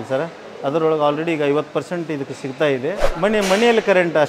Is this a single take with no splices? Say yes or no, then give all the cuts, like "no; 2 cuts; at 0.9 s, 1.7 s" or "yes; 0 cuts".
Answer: no; 1 cut; at 3.1 s